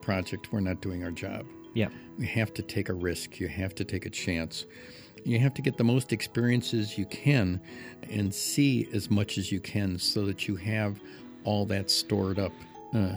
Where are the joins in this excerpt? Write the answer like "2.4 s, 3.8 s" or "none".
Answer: 5.2 s, 8.0 s